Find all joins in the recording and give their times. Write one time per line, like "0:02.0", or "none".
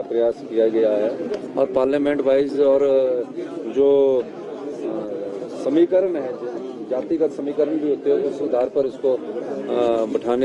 none